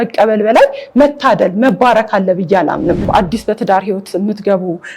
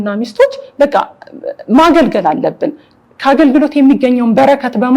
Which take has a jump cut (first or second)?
first